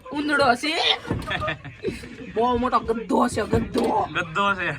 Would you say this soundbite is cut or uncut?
uncut